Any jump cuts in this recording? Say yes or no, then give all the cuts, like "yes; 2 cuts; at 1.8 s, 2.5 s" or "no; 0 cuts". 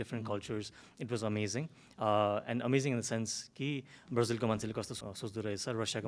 yes; 1 cut; at 5.0 s